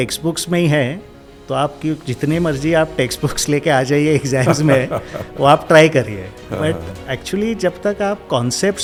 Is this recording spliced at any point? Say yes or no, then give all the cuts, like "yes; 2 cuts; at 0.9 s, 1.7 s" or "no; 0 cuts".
no; 0 cuts